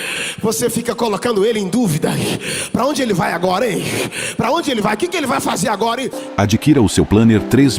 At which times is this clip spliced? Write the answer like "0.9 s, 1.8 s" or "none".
6.2 s